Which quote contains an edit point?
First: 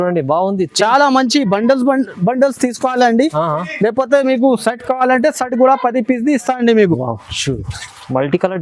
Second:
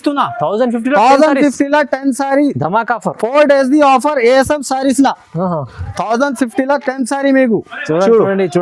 first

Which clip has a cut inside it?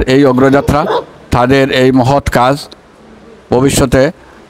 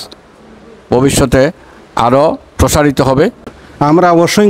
second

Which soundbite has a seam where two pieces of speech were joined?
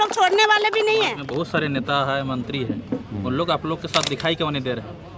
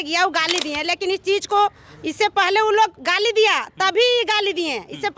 first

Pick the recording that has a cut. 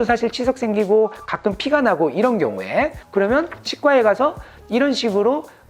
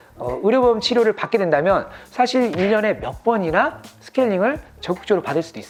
first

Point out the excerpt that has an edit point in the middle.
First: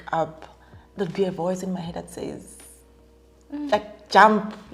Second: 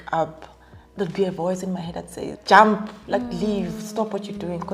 second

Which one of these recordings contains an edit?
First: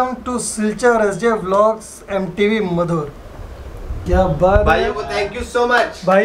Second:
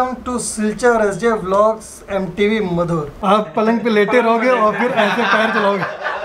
second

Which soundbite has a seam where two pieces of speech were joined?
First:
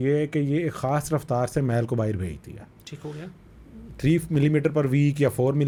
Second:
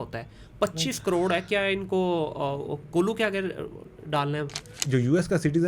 second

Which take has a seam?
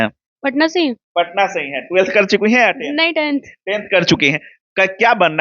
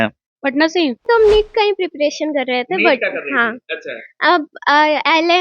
second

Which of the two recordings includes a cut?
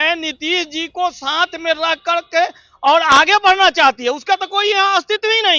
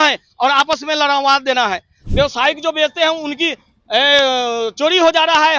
second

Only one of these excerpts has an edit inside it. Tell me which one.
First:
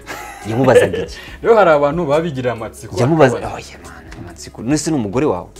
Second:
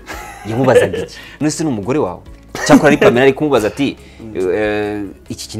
second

